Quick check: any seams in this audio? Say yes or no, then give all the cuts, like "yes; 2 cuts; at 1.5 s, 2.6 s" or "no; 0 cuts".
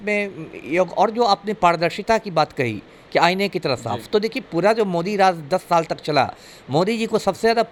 no; 0 cuts